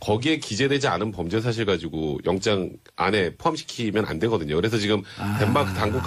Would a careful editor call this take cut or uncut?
uncut